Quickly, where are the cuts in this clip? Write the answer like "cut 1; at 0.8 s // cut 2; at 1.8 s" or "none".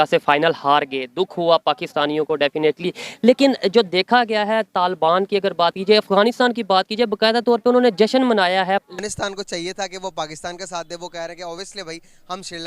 cut 1; at 8.8 s